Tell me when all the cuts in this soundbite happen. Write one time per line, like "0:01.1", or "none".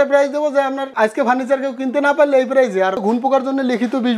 0:00.9
0:03.0